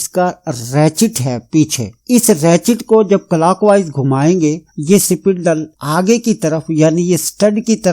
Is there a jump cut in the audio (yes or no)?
no